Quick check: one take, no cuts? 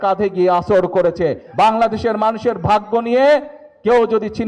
no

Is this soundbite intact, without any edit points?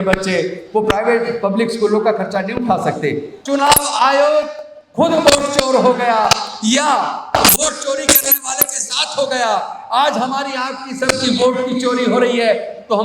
no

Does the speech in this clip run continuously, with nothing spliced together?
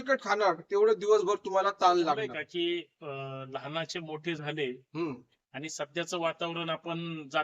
no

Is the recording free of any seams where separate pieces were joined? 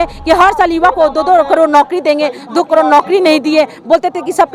yes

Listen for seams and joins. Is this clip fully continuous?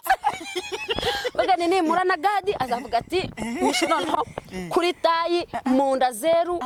yes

